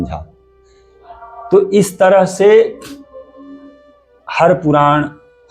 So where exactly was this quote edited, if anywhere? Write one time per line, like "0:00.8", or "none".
none

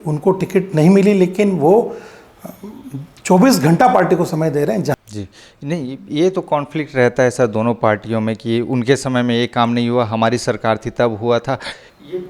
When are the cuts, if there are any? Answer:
0:05.0

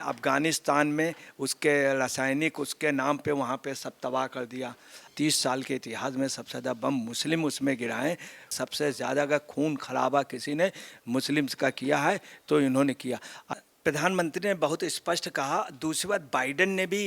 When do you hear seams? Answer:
0:05.1
0:08.6
0:13.3

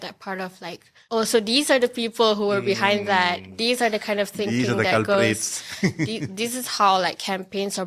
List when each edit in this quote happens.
0:00.9

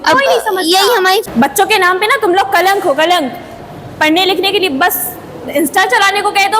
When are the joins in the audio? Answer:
0:01.2

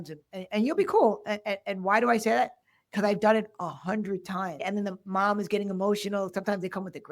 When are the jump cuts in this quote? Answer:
0:04.6

